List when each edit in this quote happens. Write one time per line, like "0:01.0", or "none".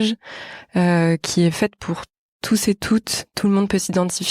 0:03.2